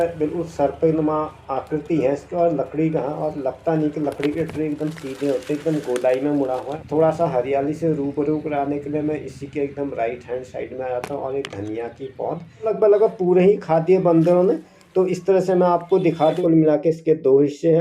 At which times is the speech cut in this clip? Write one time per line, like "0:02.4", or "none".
0:06.8
0:12.7
0:16.4